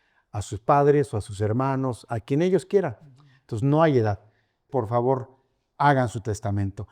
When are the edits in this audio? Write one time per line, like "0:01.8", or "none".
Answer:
0:04.6